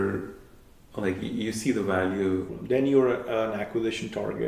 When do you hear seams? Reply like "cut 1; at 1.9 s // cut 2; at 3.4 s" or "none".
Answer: cut 1; at 2.5 s